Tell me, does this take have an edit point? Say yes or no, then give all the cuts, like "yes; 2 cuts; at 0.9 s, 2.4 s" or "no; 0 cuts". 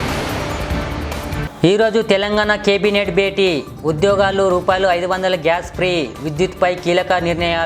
yes; 1 cut; at 1.4 s